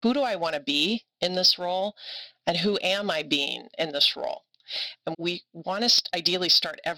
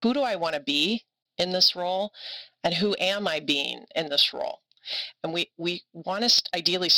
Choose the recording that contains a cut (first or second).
first